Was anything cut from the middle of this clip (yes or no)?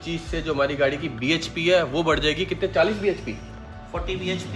no